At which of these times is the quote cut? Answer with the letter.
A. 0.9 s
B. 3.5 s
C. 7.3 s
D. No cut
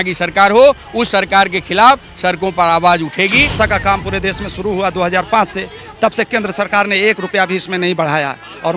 B